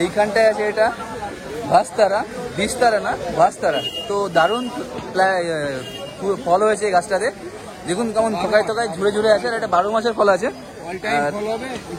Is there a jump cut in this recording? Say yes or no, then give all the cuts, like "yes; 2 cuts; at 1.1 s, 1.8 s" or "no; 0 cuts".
no; 0 cuts